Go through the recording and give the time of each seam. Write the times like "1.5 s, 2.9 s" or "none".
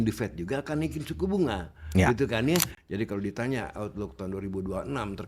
2.7 s